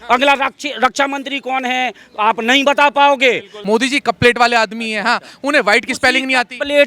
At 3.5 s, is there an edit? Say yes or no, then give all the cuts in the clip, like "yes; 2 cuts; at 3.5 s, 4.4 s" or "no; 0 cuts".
yes; 1 cut; at 3.5 s